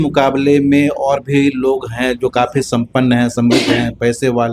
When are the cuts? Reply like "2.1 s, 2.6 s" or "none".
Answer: none

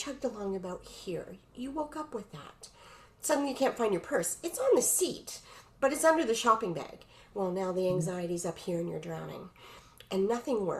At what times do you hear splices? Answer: none

